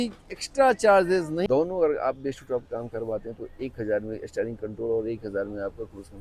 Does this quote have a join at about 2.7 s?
no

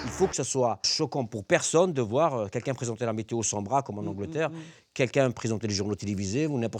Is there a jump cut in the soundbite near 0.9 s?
yes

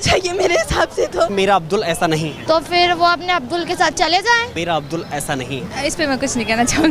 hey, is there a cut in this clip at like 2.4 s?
yes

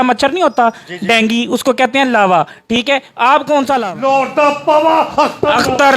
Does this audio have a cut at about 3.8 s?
yes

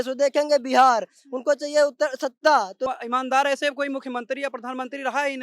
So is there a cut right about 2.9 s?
yes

